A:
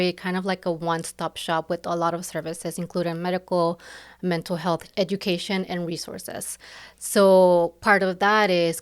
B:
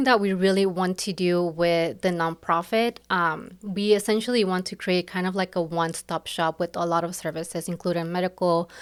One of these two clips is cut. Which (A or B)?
A